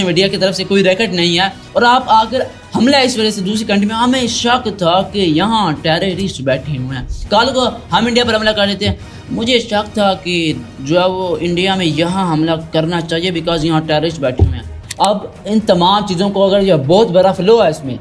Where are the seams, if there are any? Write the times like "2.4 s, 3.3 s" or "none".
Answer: 14.8 s